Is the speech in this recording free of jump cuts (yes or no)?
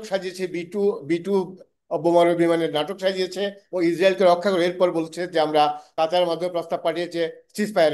no